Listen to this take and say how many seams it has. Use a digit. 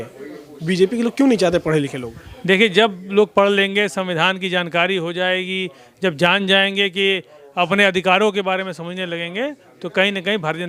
0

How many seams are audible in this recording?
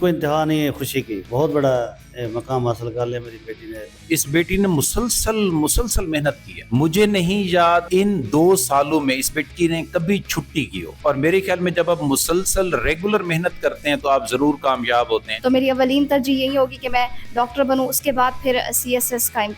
6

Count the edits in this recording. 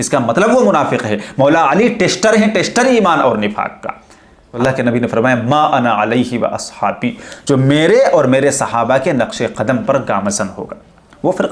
1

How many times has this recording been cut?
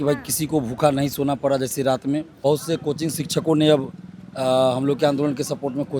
1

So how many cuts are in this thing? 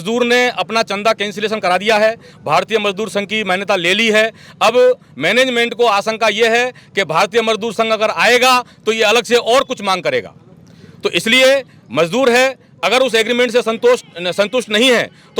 0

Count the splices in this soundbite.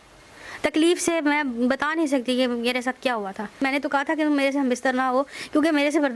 1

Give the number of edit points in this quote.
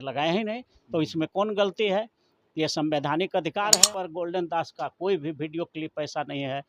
1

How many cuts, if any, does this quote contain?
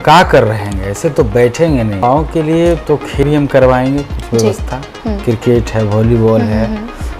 2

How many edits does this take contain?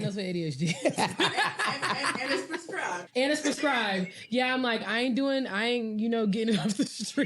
1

